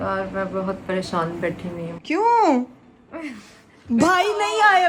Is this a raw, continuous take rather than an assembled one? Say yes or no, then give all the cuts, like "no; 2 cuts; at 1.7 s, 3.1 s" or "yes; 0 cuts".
yes; 0 cuts